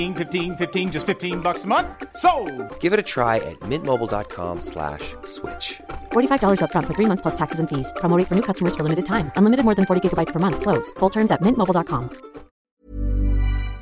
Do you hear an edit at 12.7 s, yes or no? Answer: yes